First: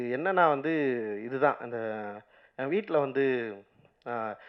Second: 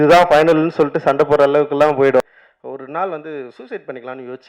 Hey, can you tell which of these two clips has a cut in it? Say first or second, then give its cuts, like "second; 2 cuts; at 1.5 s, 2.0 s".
second; 1 cut; at 2.2 s